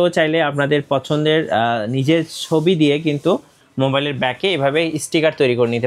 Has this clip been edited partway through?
no; 0 cuts

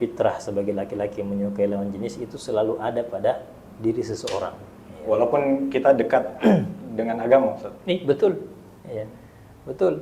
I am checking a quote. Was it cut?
no; 0 cuts

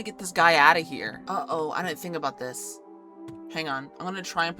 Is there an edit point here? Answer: yes; 1 cut; at 1.2 s

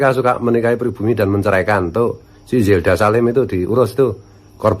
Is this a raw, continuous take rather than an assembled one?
yes; 0 cuts

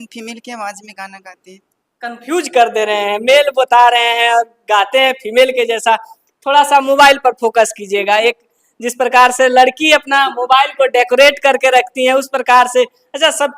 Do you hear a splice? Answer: no; 0 cuts

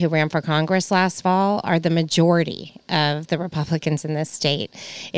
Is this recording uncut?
yes; 0 cuts

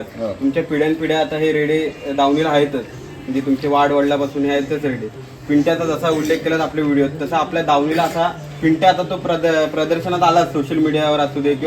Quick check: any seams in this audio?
no; 0 cuts

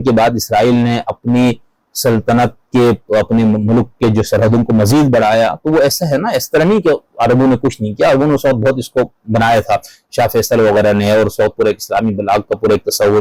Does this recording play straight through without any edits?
yes; 0 cuts

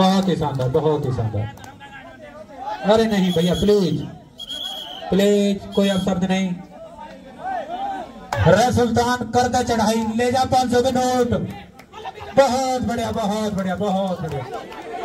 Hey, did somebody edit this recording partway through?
yes; 1 cut; at 8.3 s

